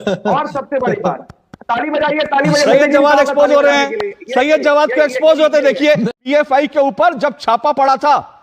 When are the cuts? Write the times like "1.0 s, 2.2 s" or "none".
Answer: 6.1 s